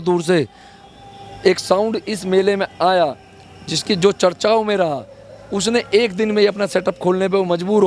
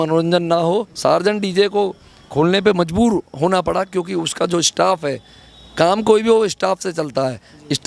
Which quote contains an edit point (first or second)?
second